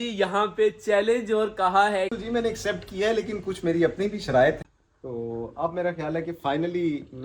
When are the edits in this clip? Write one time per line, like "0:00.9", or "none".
0:02.2
0:04.6